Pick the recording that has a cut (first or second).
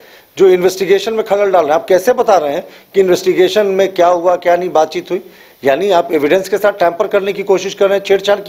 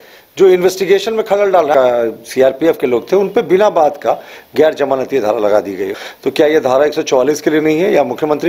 second